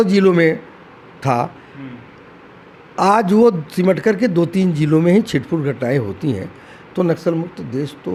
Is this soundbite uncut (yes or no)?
yes